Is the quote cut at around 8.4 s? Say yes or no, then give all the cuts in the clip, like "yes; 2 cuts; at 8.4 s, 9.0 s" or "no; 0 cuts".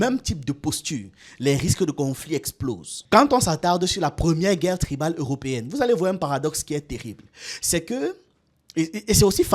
no; 1 cut; at 2.9 s